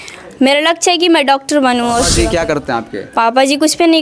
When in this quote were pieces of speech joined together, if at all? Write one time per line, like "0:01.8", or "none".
0:02.1